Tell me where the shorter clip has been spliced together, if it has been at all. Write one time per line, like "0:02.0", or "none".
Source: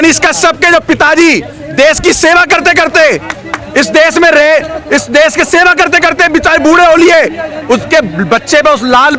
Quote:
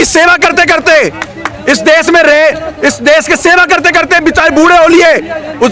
none